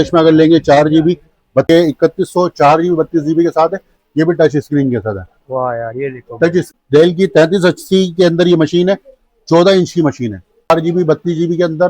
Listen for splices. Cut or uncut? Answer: cut